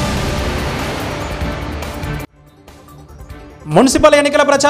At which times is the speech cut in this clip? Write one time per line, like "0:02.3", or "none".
0:03.3